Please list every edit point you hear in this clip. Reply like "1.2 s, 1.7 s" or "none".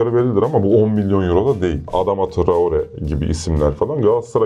1.9 s